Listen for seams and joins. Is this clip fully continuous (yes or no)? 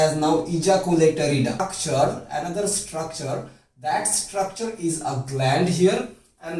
no